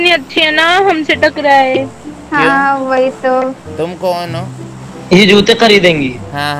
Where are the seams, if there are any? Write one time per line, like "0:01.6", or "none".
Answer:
0:04.6